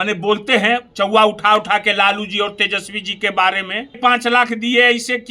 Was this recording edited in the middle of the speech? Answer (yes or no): yes